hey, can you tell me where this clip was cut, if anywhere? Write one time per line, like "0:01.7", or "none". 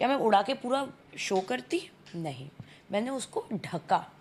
none